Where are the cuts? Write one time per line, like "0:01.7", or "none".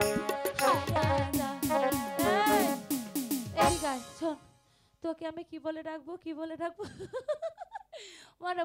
0:01.0

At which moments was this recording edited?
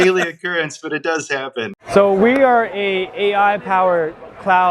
0:01.7

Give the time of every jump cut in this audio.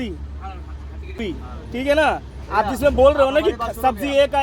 0:01.2

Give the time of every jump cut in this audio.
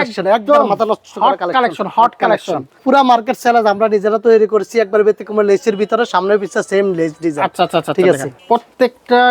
0:02.8
0:08.3

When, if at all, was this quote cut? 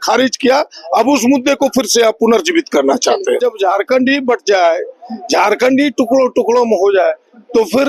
0:03.4

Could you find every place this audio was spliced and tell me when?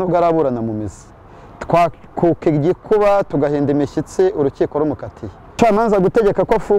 0:05.4

